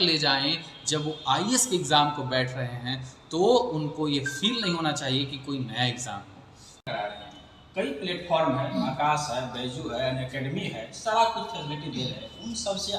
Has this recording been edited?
yes; 1 cut; at 6.8 s

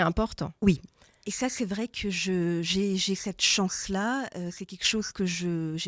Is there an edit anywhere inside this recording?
no; 0 cuts

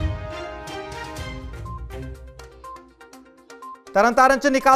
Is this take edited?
yes; 1 cut; at 3.0 s

